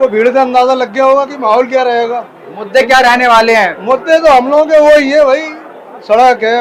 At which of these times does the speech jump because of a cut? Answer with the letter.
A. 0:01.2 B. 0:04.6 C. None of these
C